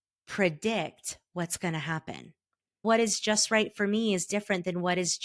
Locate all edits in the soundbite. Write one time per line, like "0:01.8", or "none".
0:02.8